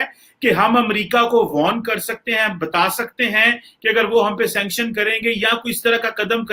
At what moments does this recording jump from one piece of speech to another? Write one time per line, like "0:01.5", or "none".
none